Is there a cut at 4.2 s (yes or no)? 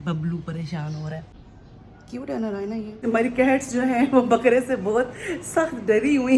no